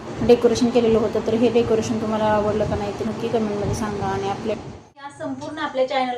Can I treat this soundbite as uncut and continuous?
no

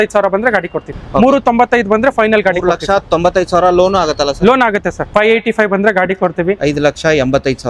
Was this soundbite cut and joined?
yes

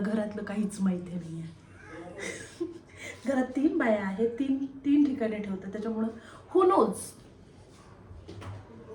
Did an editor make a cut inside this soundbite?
no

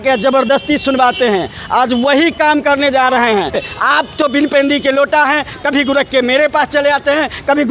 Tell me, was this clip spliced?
yes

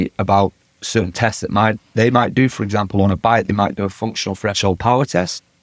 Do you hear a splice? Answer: no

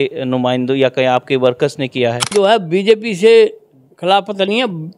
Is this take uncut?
no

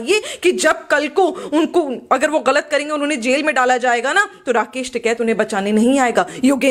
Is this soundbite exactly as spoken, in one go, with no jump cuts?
yes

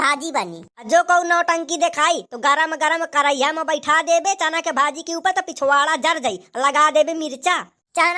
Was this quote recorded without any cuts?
yes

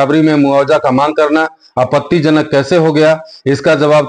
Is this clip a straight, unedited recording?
yes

